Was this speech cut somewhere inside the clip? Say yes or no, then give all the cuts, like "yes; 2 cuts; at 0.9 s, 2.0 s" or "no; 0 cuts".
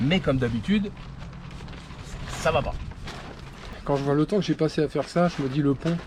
yes; 1 cut; at 3.7 s